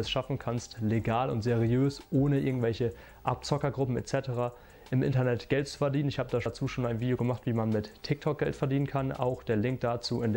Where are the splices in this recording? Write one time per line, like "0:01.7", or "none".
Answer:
0:06.5